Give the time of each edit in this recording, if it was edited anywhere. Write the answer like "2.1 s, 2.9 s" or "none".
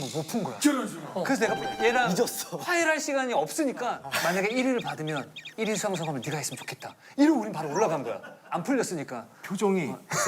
4.0 s, 8.4 s